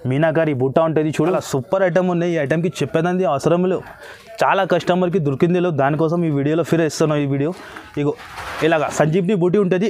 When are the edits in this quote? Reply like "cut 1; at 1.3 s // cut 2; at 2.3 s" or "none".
cut 1; at 1.4 s